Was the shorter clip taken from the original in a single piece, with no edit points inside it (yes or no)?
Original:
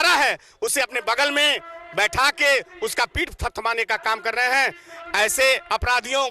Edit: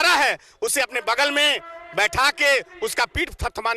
yes